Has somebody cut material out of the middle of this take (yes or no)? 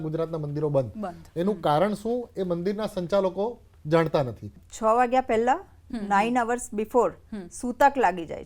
yes